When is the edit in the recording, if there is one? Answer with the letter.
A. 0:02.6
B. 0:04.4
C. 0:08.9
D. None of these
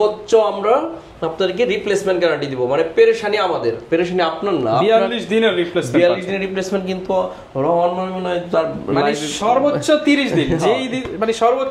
D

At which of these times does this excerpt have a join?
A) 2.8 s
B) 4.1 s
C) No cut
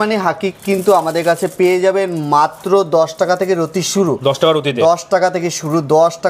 C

